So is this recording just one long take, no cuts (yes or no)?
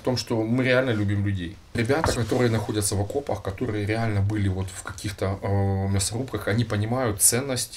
no